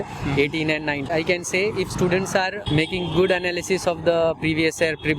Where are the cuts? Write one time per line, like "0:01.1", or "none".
0:01.1
0:02.6